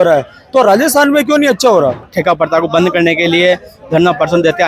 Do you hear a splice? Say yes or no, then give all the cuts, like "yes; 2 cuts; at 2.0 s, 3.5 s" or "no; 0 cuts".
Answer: yes; 1 cut; at 2.1 s